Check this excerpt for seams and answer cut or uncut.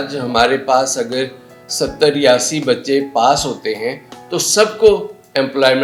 uncut